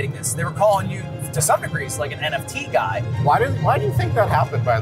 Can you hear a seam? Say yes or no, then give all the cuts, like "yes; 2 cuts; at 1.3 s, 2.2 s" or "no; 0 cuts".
no; 0 cuts